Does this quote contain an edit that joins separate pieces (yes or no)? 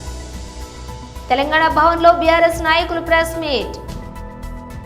no